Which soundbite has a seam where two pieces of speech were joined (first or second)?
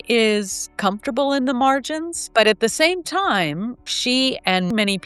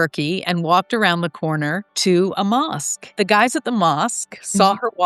second